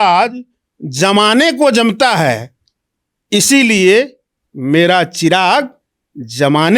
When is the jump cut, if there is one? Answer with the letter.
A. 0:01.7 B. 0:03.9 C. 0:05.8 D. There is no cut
D